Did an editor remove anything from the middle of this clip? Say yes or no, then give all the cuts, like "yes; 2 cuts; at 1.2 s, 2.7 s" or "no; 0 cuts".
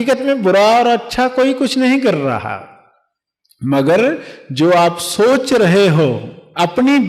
no; 0 cuts